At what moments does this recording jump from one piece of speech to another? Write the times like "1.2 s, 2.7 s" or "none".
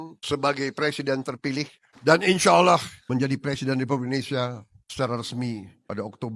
1.8 s, 3.0 s